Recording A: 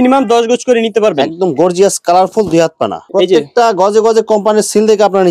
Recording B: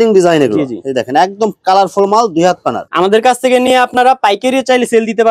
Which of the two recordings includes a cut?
A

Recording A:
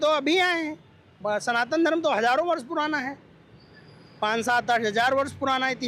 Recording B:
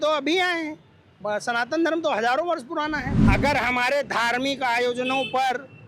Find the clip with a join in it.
B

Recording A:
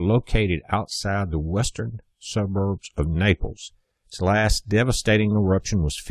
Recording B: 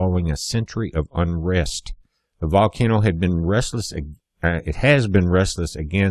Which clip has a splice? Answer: B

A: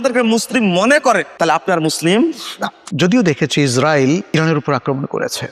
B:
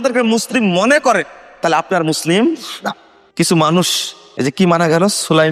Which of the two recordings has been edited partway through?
A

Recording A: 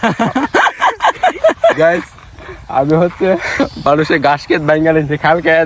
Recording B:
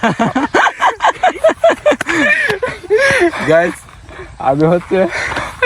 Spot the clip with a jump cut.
A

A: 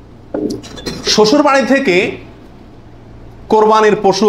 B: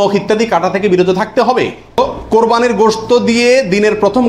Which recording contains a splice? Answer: B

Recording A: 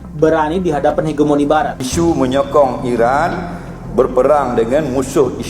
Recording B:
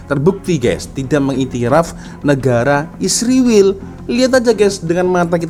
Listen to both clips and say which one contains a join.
A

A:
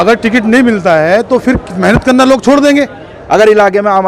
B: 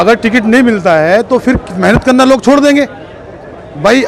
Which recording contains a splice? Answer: A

